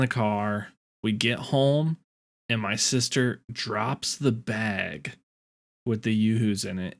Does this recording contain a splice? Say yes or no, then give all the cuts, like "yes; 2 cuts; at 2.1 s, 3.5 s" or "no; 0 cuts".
no; 0 cuts